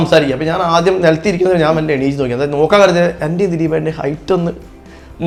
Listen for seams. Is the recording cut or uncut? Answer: uncut